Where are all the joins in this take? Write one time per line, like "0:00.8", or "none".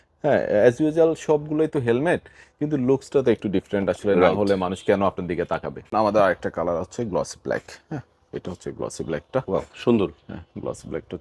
0:05.9